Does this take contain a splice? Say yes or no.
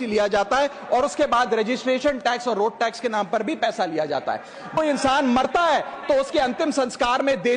yes